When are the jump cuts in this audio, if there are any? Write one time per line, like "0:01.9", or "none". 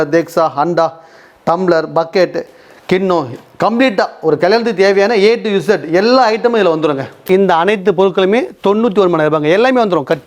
0:07.2